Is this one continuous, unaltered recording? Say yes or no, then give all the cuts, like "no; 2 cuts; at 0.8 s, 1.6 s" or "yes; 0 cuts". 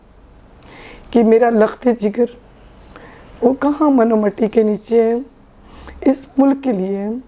yes; 0 cuts